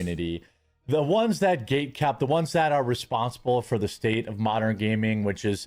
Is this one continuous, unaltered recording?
yes; 0 cuts

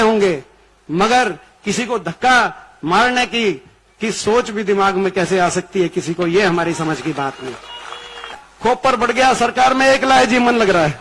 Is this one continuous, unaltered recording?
no; 1 cut; at 8.4 s

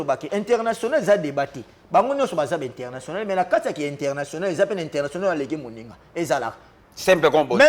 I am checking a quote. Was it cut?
no; 0 cuts

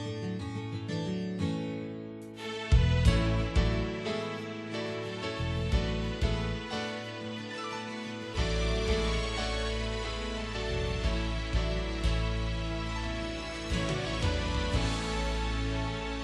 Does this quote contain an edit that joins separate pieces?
no; 0 cuts

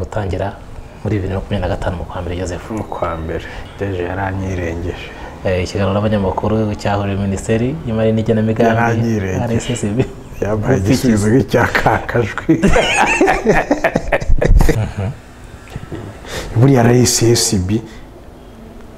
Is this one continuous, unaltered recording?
no; 2 cuts; at 3.6 s, 14.7 s

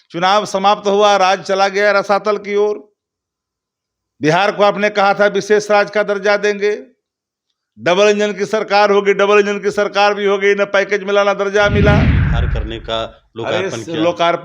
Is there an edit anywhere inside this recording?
yes; 1 cut; at 12.3 s

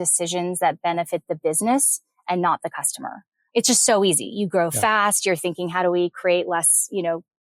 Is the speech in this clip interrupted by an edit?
no; 0 cuts

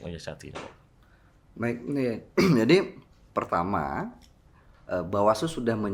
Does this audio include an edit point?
no; 0 cuts

